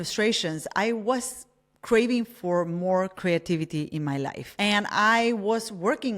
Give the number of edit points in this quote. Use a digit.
1